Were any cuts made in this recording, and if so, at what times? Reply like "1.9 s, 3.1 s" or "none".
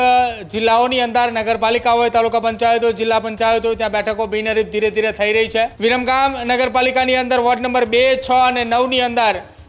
5.7 s